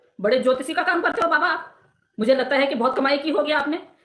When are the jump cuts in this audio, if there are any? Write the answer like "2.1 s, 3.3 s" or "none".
none